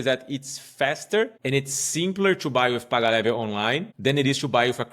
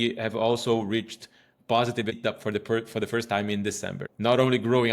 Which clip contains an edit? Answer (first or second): first